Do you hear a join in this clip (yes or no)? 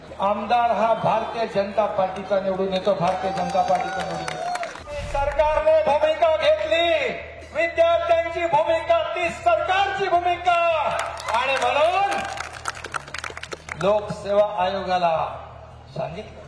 yes